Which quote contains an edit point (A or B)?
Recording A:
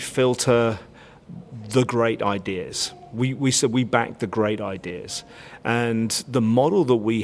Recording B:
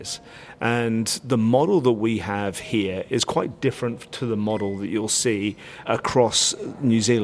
B